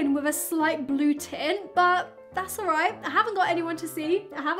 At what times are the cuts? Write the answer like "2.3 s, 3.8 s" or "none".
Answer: none